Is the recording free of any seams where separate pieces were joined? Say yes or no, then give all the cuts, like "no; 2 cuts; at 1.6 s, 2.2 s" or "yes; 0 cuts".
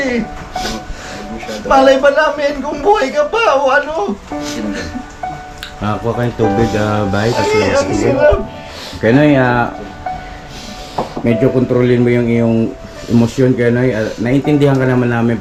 yes; 0 cuts